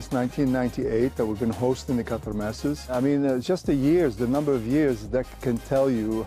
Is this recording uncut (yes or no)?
yes